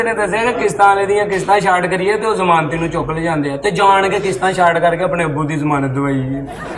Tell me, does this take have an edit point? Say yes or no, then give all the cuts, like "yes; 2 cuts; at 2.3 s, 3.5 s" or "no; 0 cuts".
no; 0 cuts